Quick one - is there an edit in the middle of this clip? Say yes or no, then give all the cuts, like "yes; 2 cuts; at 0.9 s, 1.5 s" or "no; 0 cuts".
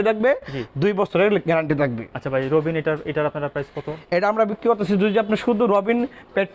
no; 0 cuts